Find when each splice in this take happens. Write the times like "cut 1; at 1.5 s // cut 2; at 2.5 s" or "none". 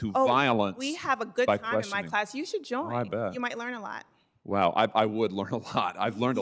none